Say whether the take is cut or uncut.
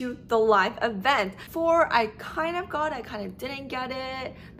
cut